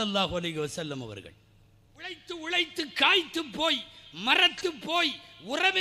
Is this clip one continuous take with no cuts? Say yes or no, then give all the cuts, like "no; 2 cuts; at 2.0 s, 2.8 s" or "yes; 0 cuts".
no; 1 cut; at 2.2 s